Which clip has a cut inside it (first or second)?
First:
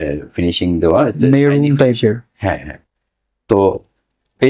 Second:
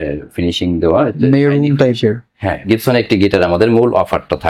second